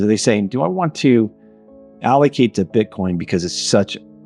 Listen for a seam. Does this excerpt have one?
no; 0 cuts

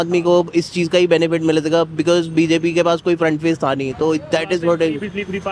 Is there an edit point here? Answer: no; 0 cuts

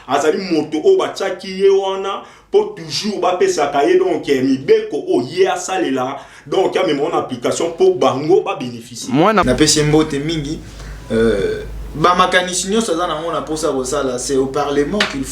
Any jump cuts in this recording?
yes; 1 cut; at 9.4 s

